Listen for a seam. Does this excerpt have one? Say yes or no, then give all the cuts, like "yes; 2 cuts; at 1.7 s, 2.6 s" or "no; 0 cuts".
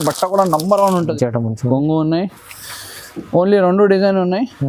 yes; 1 cut; at 1.1 s